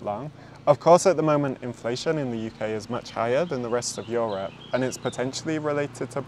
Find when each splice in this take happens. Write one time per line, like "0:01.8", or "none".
none